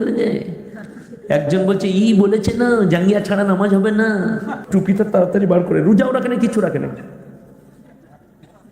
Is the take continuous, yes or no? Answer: no